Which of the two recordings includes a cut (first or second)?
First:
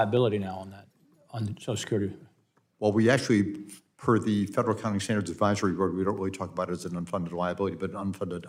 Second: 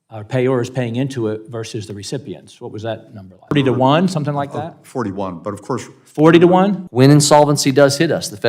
second